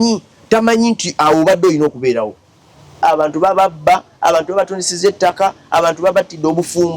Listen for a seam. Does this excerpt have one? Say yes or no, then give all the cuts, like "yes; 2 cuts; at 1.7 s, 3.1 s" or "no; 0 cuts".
yes; 1 cut; at 3.0 s